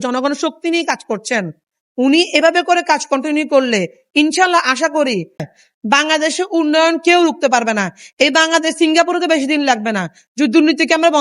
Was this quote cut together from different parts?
yes; 1 cut; at 5.5 s

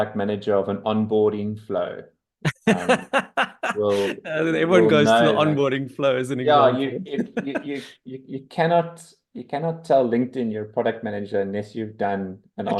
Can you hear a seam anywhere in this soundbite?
no; 0 cuts

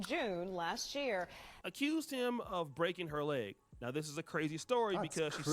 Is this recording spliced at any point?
yes; 1 cut; at 1.5 s

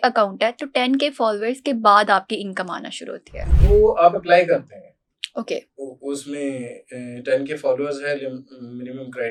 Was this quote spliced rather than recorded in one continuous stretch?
no; 0 cuts

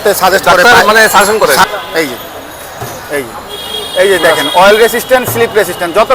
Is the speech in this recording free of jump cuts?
no; 1 cut; at 1.7 s

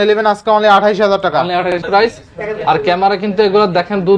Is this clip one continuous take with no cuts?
no; 1 cut; at 1.8 s

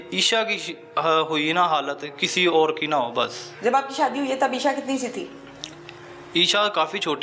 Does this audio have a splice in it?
no; 0 cuts

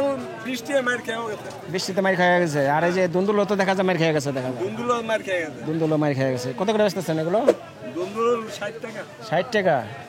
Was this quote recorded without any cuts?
yes; 0 cuts

